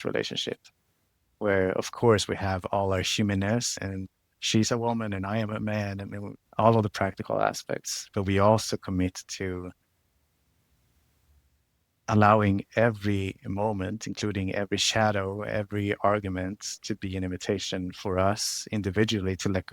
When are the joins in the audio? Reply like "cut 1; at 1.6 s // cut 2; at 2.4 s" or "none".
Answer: cut 1; at 3.7 s // cut 2; at 6.4 s

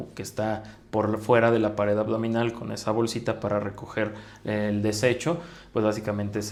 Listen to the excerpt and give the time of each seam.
none

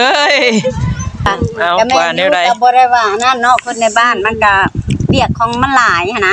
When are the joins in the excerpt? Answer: cut 1; at 1.3 s

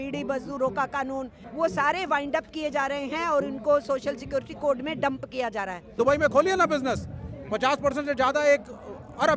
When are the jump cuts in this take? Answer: cut 1; at 1.4 s // cut 2; at 6.0 s

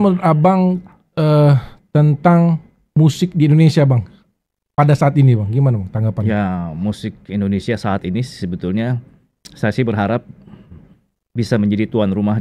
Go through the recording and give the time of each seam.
none

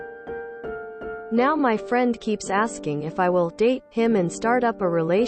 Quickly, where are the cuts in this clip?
cut 1; at 1.0 s

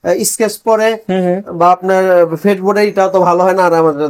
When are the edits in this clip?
none

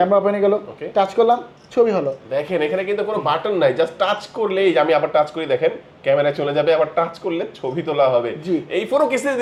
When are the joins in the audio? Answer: none

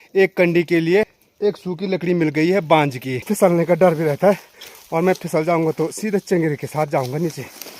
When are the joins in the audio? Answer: cut 1; at 1.2 s // cut 2; at 3.2 s

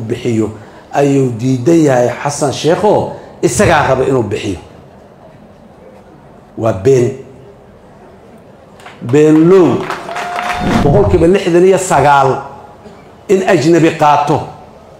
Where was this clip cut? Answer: cut 1; at 10.7 s

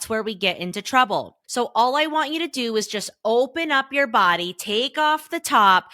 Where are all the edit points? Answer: cut 1; at 1.4 s

